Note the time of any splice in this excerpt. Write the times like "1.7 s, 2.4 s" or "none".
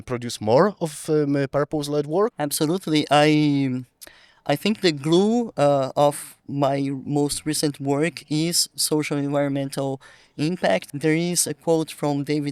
2.4 s, 10.9 s